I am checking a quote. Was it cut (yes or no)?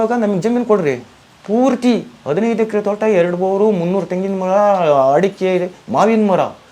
no